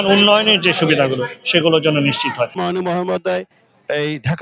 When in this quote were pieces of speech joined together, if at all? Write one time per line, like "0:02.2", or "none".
0:02.6